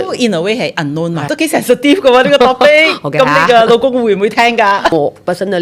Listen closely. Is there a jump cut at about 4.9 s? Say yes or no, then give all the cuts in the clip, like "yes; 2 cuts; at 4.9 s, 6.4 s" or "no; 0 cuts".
yes; 2 cuts; at 1.3 s, 4.9 s